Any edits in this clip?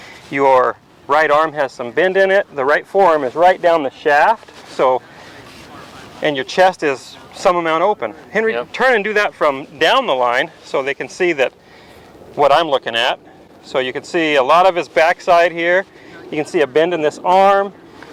no; 0 cuts

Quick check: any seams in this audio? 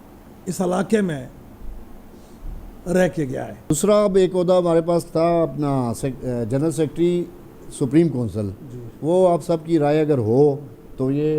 yes; 1 cut; at 3.7 s

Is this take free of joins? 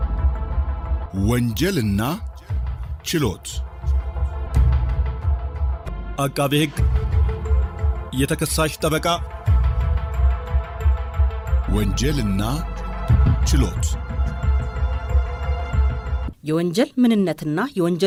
yes; 0 cuts

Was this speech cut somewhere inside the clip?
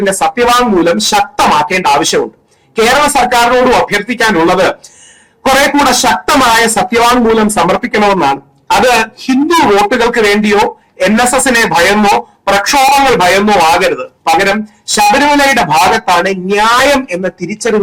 no; 0 cuts

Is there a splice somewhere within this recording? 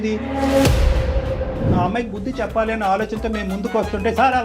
yes; 1 cut; at 1.7 s

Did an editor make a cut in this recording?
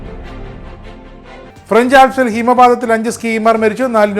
yes; 1 cut; at 0.9 s

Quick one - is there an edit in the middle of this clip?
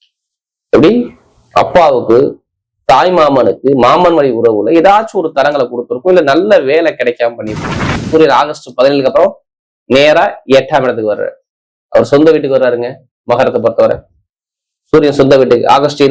yes; 1 cut; at 8.1 s

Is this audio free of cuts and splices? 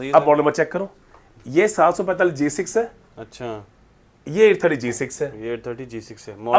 yes; 0 cuts

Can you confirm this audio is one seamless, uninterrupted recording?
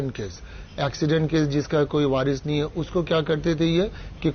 yes; 0 cuts

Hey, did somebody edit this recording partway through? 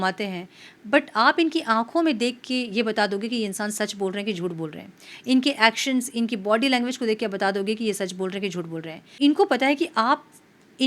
yes; 1 cut; at 9.1 s

